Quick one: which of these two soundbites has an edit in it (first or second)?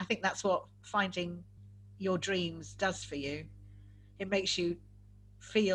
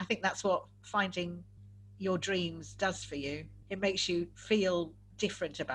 second